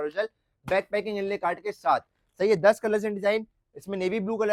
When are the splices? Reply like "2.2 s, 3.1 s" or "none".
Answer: none